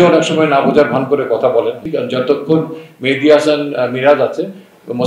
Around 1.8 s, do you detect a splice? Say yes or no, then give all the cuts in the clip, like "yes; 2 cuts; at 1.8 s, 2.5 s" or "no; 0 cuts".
yes; 1 cut; at 1.8 s